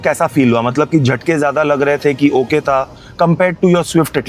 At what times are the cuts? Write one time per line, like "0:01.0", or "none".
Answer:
none